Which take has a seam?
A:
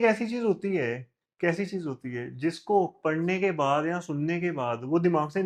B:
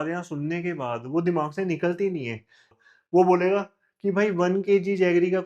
B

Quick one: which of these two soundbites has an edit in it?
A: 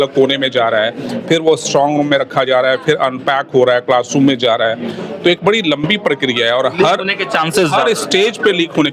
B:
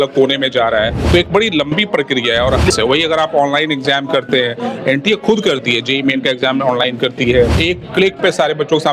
B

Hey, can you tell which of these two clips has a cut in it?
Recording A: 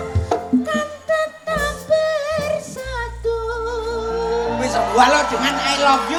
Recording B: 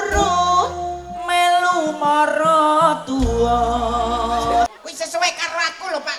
B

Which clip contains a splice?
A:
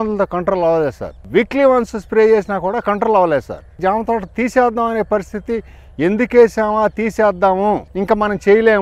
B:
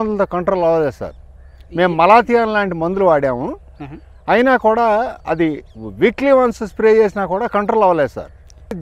A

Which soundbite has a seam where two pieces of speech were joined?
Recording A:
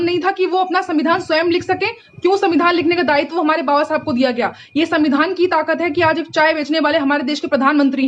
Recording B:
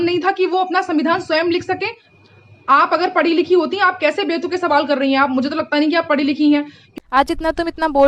B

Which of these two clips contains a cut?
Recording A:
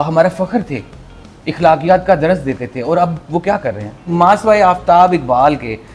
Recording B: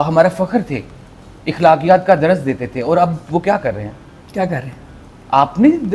A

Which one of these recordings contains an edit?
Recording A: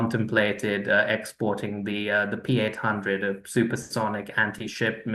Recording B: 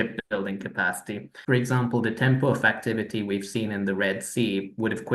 B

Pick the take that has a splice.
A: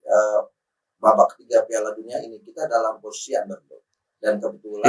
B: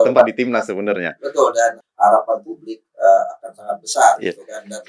B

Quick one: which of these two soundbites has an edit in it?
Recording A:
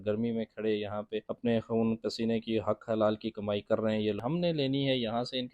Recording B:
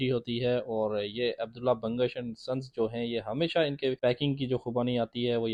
A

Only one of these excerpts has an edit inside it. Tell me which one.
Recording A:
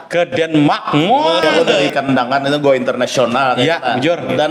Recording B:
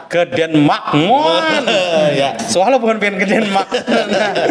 A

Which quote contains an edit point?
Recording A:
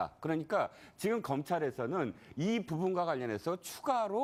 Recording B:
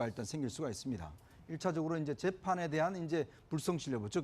B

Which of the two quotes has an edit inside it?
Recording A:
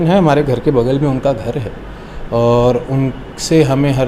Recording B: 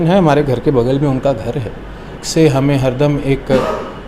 B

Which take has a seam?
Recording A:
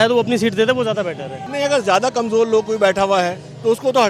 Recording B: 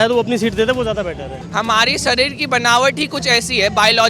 B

